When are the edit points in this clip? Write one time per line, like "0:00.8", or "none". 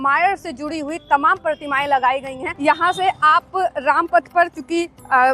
0:02.5